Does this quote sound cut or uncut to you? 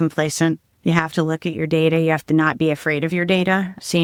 uncut